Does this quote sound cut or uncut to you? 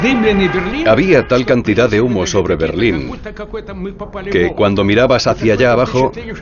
uncut